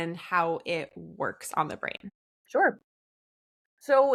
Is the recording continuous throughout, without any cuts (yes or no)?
yes